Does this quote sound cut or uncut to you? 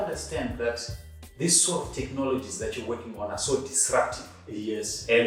uncut